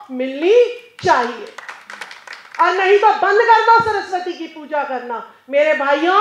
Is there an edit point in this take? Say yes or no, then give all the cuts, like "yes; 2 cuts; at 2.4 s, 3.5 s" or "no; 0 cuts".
no; 0 cuts